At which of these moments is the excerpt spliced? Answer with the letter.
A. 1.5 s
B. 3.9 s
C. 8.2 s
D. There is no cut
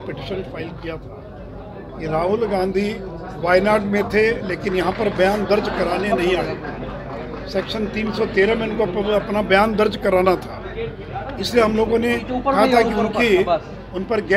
D